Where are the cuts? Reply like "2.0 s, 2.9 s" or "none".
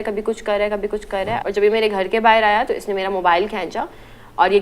1.4 s